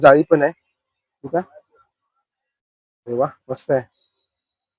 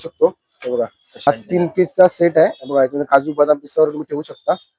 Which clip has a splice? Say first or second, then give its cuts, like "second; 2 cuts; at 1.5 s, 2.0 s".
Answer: second; 1 cut; at 1.3 s